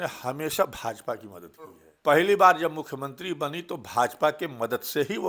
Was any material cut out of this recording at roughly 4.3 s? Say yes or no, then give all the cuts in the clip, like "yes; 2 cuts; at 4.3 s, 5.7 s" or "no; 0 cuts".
no; 1 cut; at 1.9 s